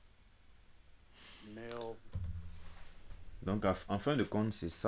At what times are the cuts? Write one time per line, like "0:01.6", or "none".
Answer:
none

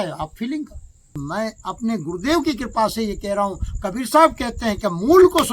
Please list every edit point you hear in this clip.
0:01.2

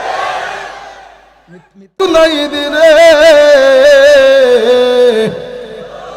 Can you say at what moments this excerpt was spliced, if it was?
0:01.9

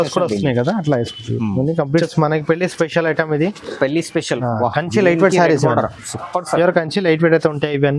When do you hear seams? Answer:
0:02.0

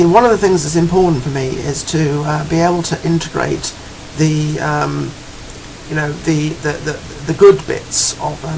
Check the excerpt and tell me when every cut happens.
none

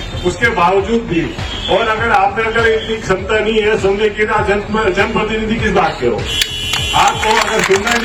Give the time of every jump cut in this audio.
none

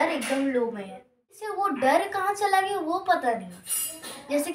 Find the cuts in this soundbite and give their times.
0:01.4

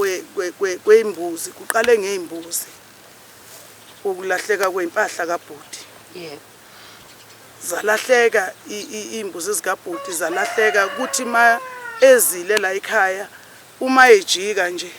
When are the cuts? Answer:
none

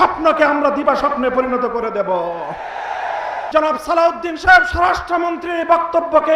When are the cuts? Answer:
0:03.4

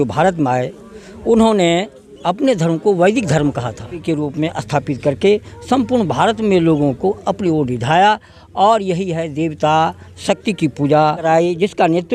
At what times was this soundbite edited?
0:04.0
0:11.2

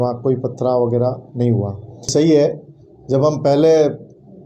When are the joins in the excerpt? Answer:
0:02.1

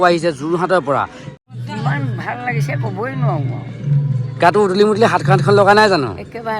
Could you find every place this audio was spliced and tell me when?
0:01.2

